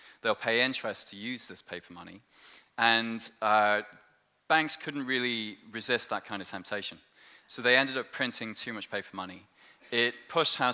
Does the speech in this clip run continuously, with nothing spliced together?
yes; 0 cuts

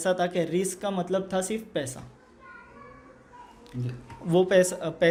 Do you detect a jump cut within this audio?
no; 0 cuts

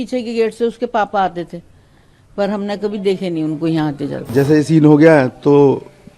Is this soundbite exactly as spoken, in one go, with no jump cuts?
no; 1 cut; at 4.3 s

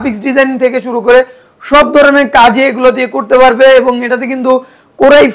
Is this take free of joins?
yes; 0 cuts

